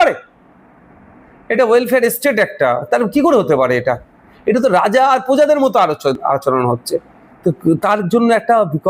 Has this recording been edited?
no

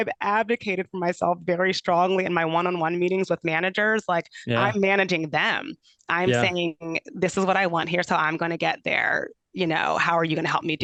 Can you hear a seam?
no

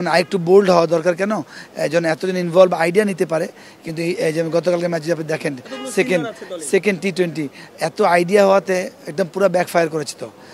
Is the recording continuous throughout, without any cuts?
yes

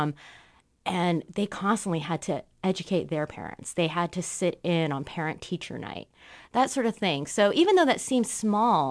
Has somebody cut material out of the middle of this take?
no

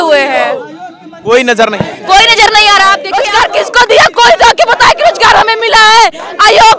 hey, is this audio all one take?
no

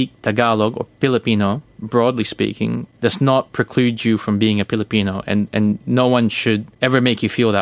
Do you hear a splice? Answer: yes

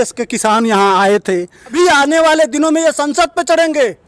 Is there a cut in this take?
yes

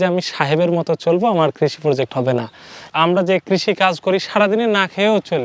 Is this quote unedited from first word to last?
no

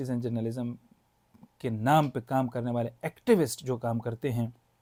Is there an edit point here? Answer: no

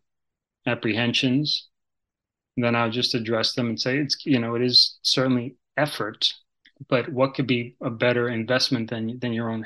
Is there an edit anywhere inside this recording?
no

